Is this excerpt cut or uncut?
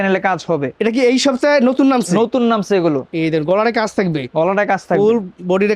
uncut